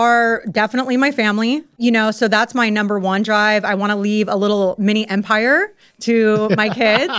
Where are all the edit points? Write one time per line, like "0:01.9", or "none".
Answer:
0:01.8